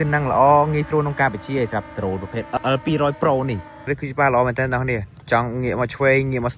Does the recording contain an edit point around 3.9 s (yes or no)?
yes